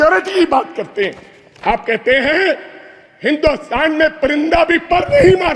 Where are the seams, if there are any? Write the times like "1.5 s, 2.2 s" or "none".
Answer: none